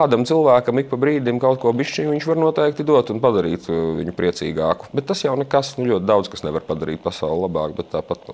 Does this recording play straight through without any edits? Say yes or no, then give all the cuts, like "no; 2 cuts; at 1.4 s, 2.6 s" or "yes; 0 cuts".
no; 1 cut; at 4.9 s